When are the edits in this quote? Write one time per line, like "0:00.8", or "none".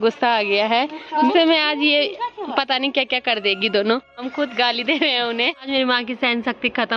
0:01.3
0:04.2
0:05.6

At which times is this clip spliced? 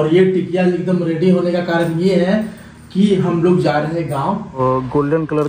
0:04.6

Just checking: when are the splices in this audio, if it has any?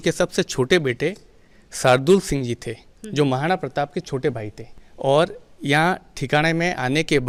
none

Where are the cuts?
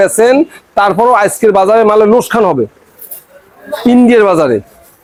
none

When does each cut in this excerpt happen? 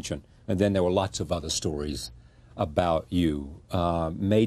0:03.4

